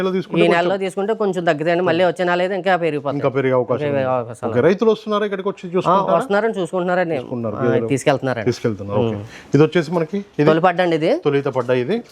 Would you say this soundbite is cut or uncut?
uncut